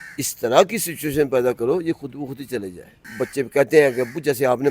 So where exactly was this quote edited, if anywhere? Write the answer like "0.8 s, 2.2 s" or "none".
3.0 s